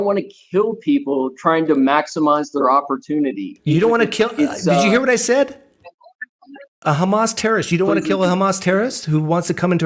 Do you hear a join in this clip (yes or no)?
yes